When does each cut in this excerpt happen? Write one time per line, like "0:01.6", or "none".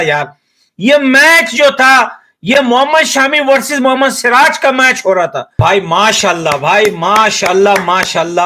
0:05.6